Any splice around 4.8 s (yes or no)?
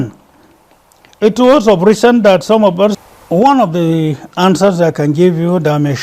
no